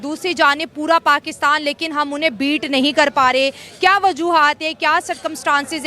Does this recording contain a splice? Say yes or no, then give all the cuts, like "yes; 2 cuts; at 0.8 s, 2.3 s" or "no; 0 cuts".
no; 0 cuts